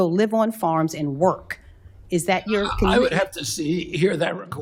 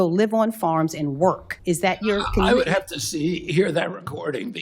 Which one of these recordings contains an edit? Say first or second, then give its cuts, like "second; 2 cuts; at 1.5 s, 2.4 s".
second; 1 cut; at 1.5 s